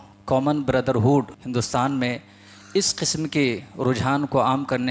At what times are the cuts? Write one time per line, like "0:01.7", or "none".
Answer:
0:01.4